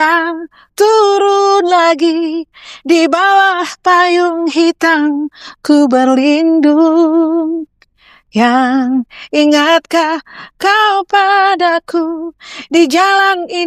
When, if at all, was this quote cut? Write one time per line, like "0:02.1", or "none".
none